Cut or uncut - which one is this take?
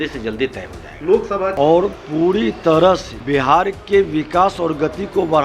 cut